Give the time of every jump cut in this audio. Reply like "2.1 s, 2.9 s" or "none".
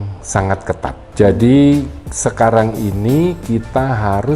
1.0 s

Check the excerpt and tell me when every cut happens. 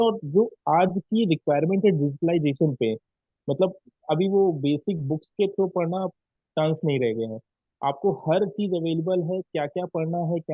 none

